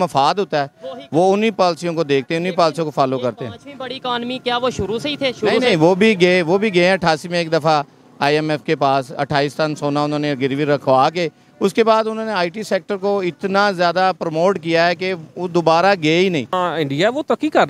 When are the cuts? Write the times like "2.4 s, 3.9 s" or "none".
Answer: 16.5 s